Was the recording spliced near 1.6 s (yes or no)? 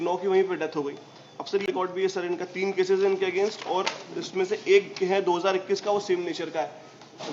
yes